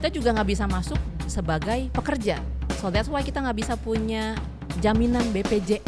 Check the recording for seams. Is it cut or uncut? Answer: uncut